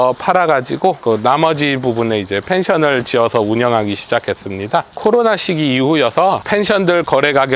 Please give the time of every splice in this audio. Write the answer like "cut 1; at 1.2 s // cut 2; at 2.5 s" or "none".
cut 1; at 4.9 s